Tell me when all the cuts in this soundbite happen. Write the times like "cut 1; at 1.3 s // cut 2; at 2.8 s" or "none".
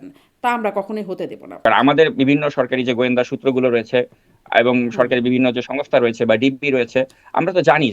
cut 1; at 1.5 s